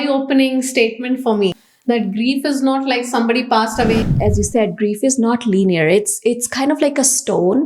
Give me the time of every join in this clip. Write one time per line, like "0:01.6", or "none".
0:01.7
0:04.0

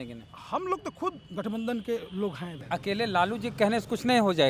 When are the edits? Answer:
0:02.5

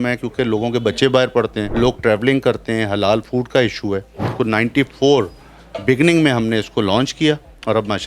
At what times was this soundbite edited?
0:01.6
0:04.3

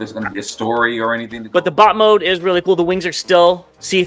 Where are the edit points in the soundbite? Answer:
0:01.3

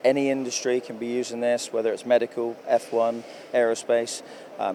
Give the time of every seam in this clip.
none

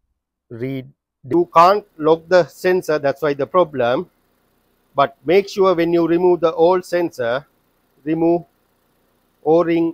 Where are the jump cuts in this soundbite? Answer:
0:01.3

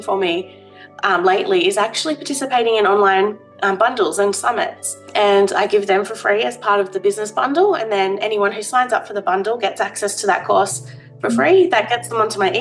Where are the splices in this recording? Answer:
0:05.1

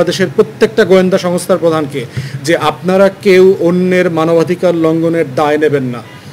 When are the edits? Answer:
none

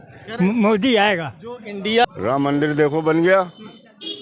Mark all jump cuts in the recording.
0:02.1

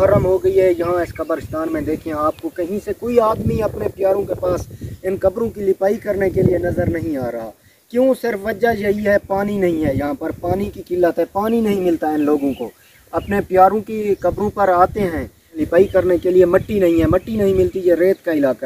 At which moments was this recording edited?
0:15.6

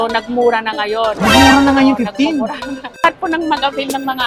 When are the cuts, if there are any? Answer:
0:02.9

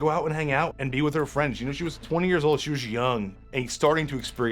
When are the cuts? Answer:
0:00.7
0:02.0
0:03.4

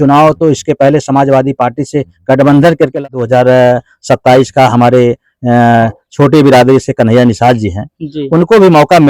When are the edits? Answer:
0:03.0

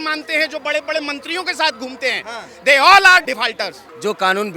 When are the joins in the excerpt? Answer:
0:03.4

